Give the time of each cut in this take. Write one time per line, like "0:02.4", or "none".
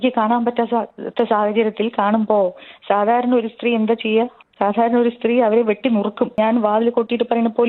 0:06.4